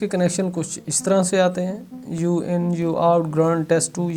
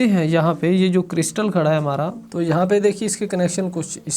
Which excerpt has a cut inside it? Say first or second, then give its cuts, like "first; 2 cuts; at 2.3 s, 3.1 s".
second; 1 cut; at 2.2 s